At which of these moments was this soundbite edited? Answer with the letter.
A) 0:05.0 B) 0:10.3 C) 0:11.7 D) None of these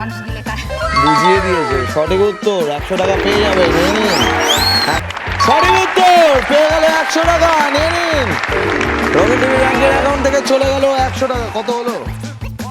A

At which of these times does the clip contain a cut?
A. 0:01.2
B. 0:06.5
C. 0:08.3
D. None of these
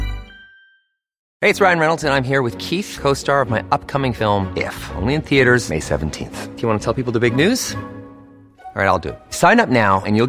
A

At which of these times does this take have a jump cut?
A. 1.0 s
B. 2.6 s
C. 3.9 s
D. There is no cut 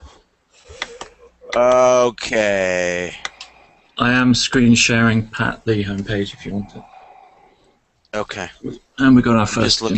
B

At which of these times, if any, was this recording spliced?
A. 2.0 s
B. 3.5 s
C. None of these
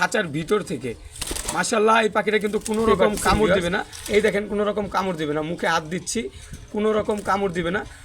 B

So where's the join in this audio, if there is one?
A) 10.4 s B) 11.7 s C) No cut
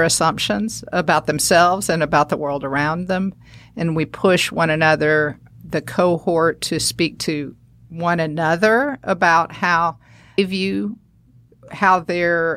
A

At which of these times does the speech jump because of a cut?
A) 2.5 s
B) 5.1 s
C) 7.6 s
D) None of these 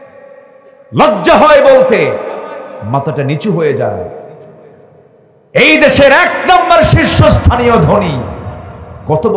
D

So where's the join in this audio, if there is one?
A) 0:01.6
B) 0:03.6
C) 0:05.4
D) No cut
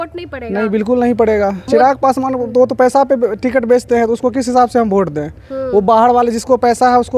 A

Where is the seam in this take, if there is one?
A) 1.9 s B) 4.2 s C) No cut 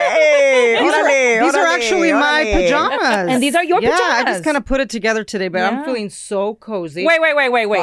C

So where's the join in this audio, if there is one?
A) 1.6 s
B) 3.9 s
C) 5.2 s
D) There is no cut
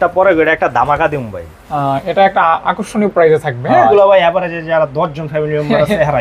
B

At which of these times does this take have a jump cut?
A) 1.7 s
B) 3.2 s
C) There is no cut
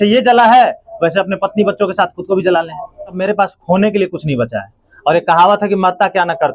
B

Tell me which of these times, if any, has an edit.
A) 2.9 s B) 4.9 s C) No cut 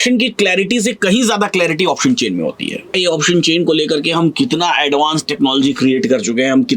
A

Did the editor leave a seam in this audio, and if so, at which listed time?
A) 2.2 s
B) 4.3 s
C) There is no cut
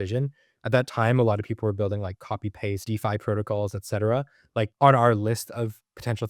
C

